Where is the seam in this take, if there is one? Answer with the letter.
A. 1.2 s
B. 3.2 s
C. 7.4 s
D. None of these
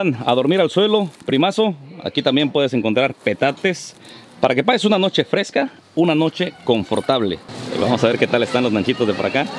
C